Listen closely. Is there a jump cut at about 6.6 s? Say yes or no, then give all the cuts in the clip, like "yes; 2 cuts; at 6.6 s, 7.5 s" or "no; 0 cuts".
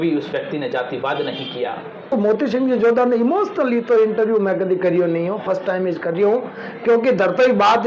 no; 1 cut; at 2.1 s